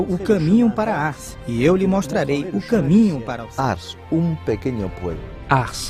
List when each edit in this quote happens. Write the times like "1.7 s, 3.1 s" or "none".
none